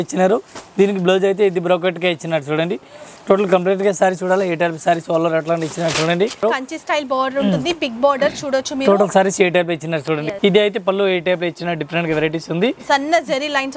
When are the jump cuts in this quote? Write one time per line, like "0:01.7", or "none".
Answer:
0:06.4
0:10.3